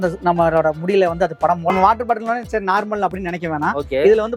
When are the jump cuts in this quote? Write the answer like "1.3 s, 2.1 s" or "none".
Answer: 1.7 s